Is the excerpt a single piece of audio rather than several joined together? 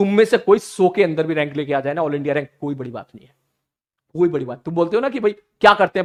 yes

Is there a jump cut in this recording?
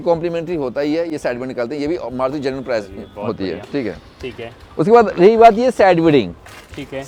no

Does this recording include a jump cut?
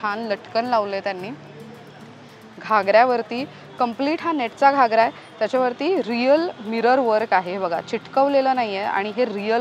no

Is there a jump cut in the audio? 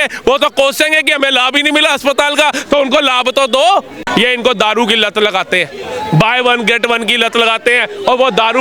yes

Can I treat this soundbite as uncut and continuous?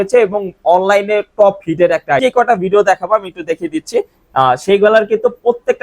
no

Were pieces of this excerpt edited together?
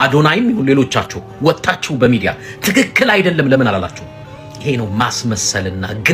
no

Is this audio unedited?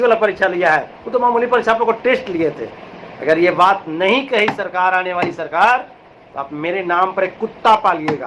yes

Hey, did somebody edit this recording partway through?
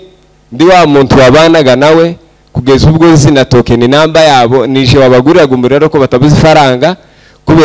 no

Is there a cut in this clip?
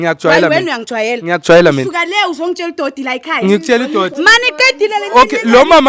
no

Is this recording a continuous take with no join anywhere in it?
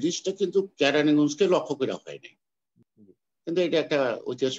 no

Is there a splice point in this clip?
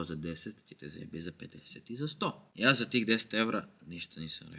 no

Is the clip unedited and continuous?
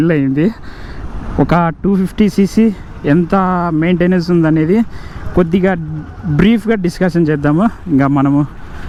yes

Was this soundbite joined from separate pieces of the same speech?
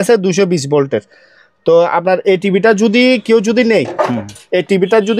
no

